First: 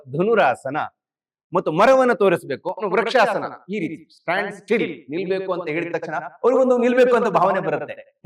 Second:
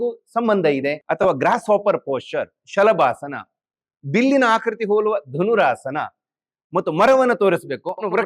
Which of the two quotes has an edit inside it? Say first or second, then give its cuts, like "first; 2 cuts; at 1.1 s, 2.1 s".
second; 1 cut; at 1.0 s